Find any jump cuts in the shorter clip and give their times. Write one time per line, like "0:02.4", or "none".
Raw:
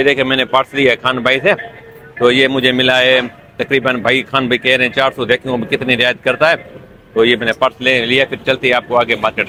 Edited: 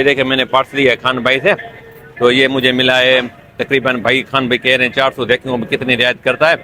none